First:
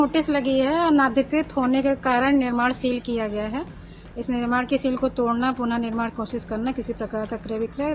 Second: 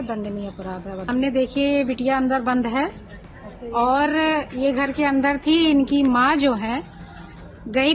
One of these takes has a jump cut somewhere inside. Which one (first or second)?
second